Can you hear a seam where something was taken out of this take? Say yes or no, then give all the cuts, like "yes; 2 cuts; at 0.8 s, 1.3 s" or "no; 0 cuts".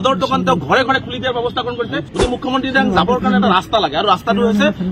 yes; 1 cut; at 2.0 s